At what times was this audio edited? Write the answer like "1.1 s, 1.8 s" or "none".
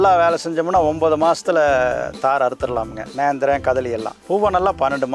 4.1 s